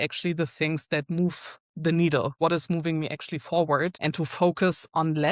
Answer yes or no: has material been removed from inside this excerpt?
yes